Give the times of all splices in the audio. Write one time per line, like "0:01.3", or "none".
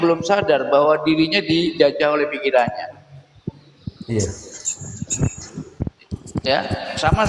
none